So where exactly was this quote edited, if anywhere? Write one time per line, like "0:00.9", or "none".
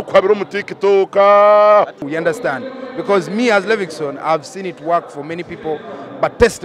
0:02.0